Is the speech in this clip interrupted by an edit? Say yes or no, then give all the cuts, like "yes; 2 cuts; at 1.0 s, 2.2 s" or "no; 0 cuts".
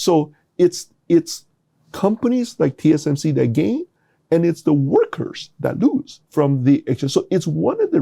no; 0 cuts